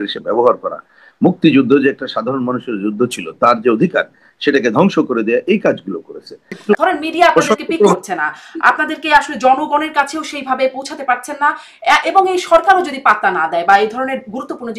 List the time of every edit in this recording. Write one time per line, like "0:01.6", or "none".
0:06.5